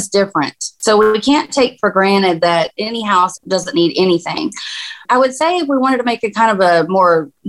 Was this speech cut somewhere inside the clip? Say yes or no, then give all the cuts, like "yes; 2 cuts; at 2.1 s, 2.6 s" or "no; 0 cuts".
yes; 1 cut; at 2.8 s